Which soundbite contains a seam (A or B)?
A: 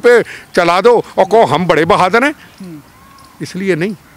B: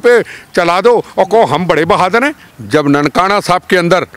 B